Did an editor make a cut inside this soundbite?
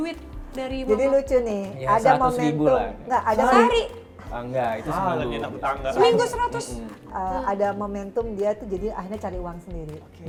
no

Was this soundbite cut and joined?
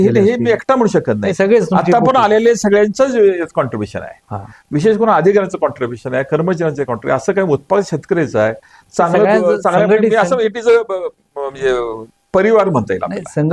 no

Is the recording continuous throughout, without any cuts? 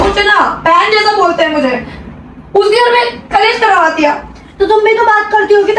yes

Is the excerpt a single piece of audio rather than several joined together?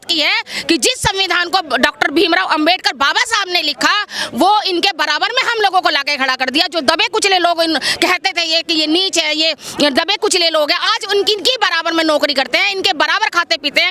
yes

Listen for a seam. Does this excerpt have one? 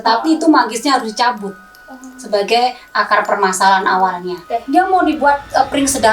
yes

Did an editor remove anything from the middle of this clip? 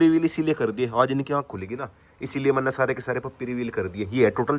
no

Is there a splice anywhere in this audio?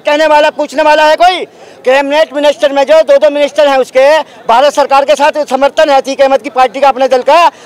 no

